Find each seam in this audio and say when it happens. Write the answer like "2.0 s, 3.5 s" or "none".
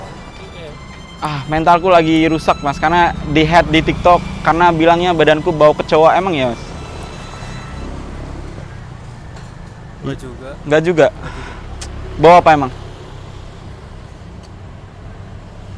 none